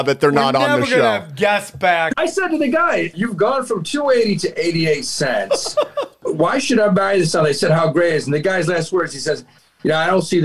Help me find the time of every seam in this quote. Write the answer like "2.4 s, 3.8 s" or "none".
2.1 s, 3.1 s, 6.2 s

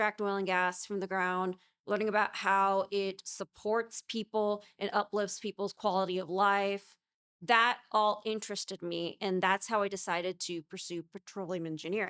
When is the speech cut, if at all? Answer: none

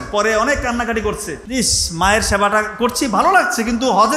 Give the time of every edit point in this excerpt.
1.3 s

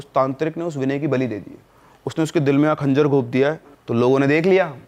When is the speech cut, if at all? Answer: 3.7 s

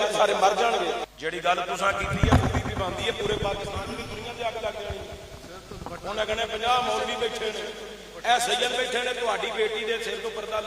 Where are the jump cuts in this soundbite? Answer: 1.1 s

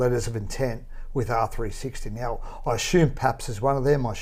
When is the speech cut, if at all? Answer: none

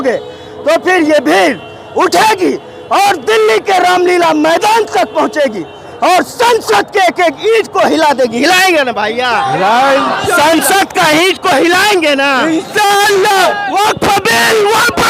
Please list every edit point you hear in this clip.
13.4 s

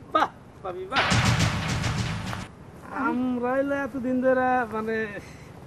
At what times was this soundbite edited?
1.0 s, 2.8 s

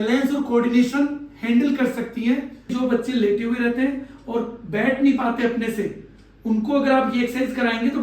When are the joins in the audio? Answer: 2.7 s

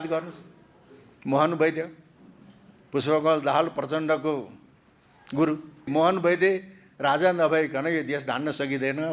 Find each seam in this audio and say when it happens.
5.9 s

